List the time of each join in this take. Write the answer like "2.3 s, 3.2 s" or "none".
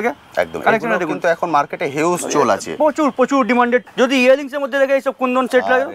3.9 s